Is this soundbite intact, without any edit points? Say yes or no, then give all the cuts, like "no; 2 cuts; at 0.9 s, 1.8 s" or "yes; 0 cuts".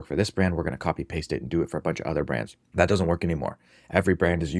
no; 1 cut; at 2.6 s